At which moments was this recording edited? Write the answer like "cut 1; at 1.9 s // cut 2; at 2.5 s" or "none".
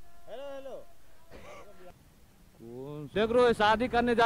cut 1; at 2.4 s